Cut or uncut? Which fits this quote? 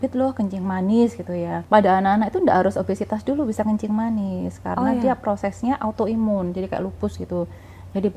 cut